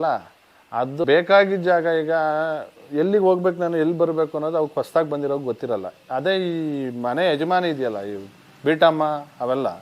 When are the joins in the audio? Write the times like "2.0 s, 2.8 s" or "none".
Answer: 1.0 s